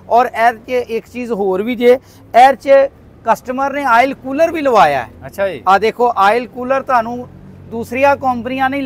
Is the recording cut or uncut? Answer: uncut